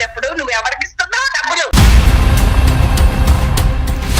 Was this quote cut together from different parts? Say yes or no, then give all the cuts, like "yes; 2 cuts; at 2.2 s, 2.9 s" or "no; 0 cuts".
yes; 1 cut; at 1.7 s